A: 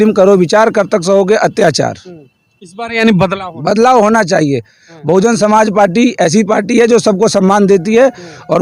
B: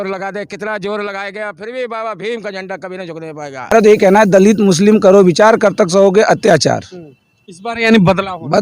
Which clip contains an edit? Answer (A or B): B